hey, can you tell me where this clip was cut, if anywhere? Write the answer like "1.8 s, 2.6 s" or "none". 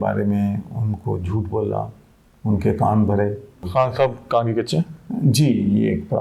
3.6 s